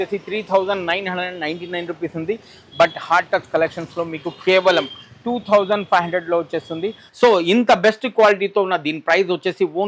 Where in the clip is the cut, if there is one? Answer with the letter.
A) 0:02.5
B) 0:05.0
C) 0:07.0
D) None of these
C